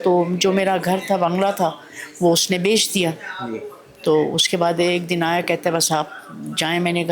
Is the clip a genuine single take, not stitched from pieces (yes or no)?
yes